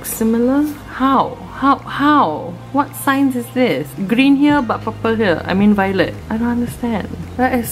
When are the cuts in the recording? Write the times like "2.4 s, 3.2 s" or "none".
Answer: 0.8 s, 3.9 s